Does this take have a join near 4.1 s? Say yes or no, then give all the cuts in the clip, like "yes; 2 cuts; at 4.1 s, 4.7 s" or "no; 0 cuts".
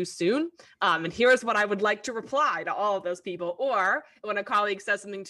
no; 0 cuts